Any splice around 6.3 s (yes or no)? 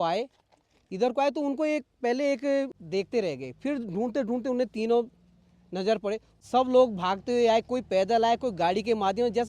yes